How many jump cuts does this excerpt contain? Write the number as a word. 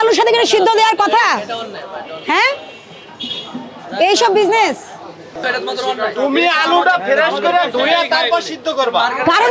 one